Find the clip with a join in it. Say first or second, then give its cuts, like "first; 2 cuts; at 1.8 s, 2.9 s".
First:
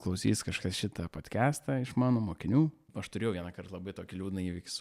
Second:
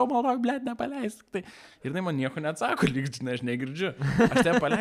first; 1 cut; at 2.9 s